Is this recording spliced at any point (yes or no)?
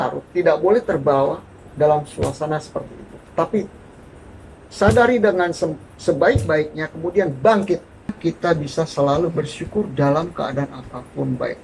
yes